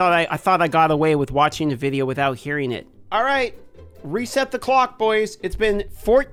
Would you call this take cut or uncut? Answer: uncut